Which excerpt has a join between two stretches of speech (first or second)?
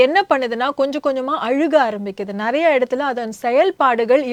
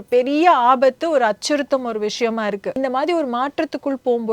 second